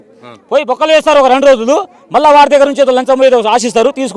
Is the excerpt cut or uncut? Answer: uncut